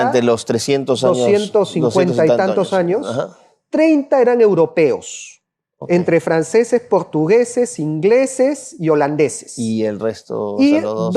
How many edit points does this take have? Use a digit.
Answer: 0